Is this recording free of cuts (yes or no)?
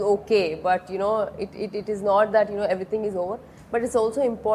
yes